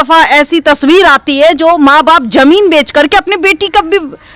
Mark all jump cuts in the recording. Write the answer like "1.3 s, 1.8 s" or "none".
none